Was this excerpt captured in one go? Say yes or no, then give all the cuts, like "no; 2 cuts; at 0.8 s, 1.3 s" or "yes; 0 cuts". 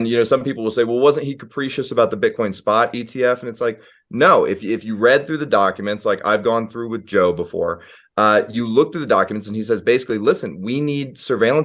yes; 0 cuts